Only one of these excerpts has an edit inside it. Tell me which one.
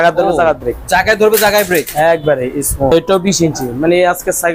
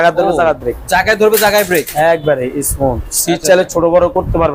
first; 1 cut; at 2.9 s

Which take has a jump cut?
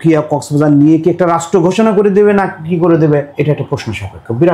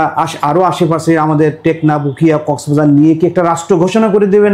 first; 1 cut; at 3.3 s

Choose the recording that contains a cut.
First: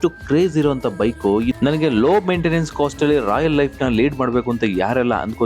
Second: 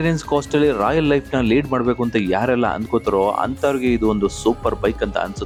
first; 1 cut; at 1.6 s

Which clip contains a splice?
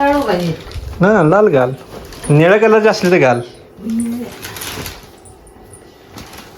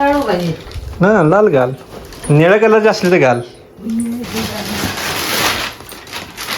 second; 1 cut; at 4.3 s

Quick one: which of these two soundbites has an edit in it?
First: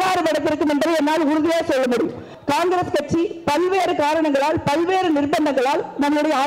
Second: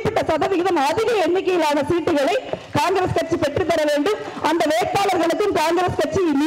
first; 1 cut; at 2.3 s

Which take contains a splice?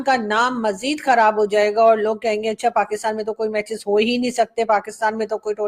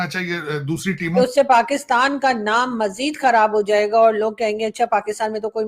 second; 1 cut; at 1.1 s

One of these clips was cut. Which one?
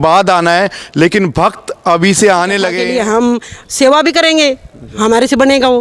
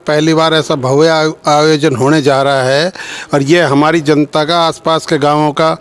first; 1 cut; at 2.8 s

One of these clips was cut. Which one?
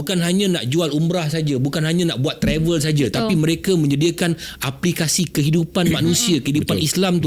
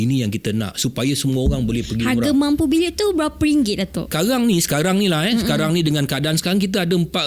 second; 1 cut; at 4.1 s

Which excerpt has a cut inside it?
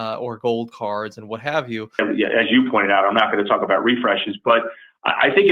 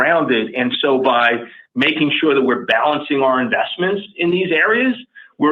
first; 1 cut; at 2.0 s

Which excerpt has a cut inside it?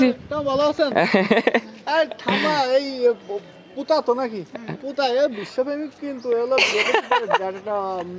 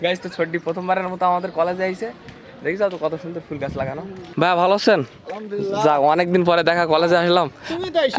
second; 1 cut; at 4.3 s

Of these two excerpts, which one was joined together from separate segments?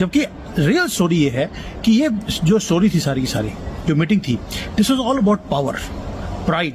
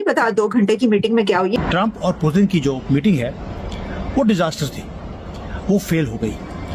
second; 1 cut; at 1.5 s

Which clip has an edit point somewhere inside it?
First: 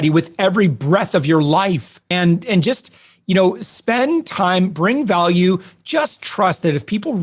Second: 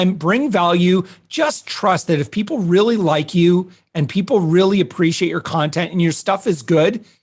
first; 1 cut; at 2.0 s

